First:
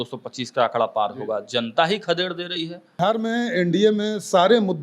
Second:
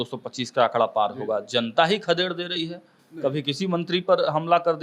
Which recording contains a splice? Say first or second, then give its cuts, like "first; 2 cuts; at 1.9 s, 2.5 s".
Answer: first; 1 cut; at 3.0 s